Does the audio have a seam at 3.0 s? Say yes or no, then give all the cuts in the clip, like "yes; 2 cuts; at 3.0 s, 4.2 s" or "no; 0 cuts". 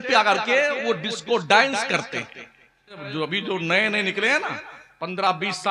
yes; 1 cut; at 3.0 s